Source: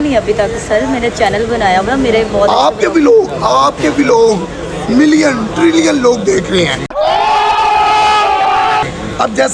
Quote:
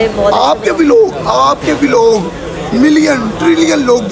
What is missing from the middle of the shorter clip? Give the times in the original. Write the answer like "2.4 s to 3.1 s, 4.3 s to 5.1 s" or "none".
none